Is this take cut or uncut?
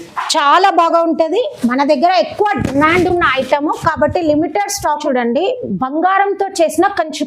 cut